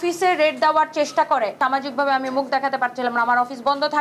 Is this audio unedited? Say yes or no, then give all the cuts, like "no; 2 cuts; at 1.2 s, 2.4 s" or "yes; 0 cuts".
no; 1 cut; at 1.5 s